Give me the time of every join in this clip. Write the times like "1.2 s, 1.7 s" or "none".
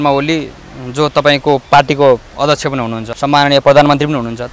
3.0 s

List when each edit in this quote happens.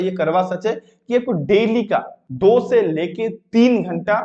2.2 s

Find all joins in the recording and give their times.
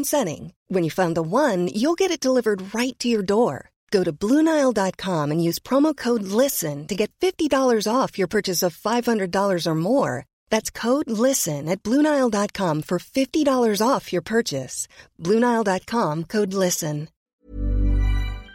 17.4 s

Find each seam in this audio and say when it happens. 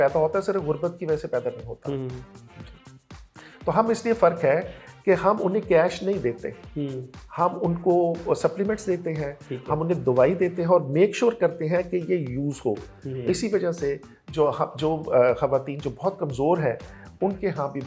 none

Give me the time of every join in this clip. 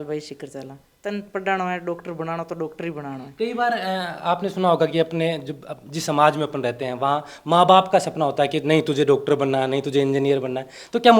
none

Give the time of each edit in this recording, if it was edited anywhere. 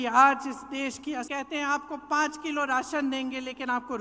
1.3 s

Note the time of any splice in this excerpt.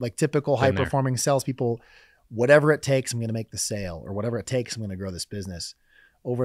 none

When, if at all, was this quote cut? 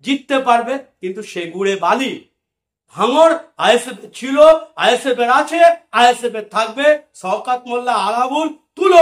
none

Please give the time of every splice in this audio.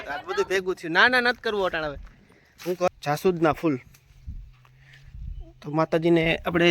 2.9 s

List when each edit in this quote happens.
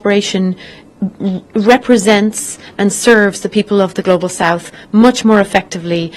none

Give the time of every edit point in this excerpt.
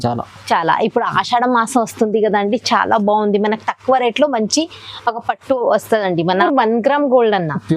6.4 s

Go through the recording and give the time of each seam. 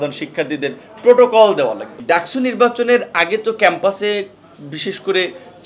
1.9 s

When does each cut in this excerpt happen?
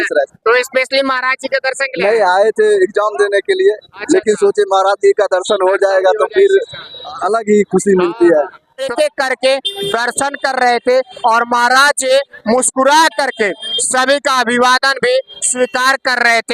8.9 s

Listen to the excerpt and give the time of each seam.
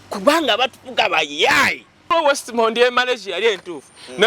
2.1 s

